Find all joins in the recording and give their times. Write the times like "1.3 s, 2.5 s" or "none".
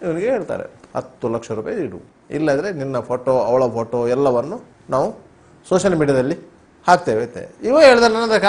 none